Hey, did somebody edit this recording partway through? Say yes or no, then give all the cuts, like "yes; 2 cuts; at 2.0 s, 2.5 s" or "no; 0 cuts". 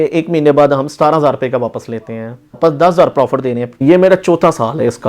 yes; 2 cuts; at 2.6 s, 3.8 s